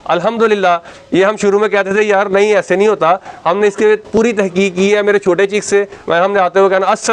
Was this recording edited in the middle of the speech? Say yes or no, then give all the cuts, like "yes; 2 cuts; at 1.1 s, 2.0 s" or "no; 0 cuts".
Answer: no; 0 cuts